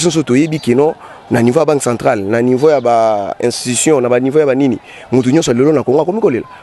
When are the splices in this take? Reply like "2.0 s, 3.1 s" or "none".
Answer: none